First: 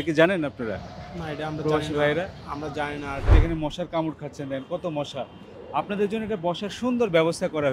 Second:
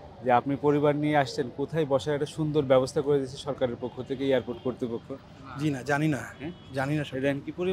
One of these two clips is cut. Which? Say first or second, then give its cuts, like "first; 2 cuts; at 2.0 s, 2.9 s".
first; 1 cut; at 3.3 s